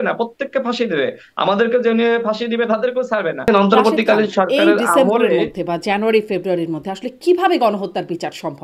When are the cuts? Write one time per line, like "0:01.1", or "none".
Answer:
0:03.5